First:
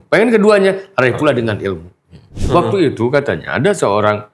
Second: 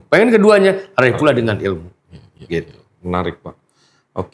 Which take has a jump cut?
first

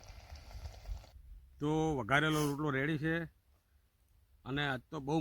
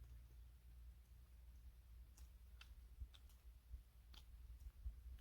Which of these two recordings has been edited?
first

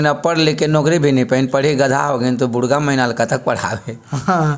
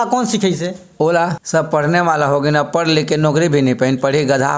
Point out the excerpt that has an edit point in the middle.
second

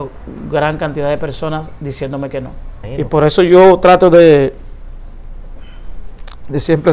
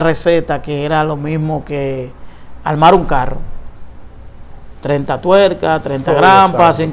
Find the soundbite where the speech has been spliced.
first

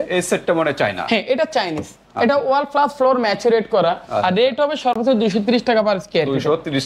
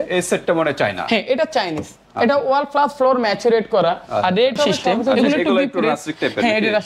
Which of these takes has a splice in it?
second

